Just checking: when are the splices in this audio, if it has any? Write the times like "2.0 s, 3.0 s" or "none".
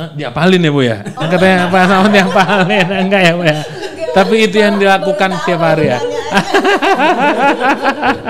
none